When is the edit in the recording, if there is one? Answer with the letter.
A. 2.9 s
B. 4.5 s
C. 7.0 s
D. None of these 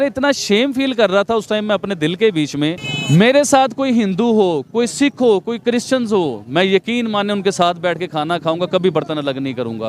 A